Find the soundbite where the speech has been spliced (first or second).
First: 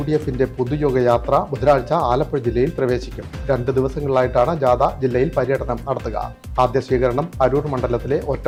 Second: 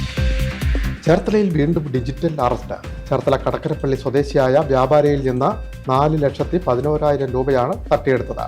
second